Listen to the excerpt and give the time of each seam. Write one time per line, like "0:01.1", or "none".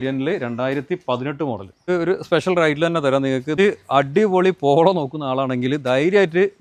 0:01.8
0:03.5